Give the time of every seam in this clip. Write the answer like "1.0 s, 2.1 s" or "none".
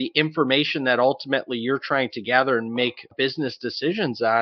3.1 s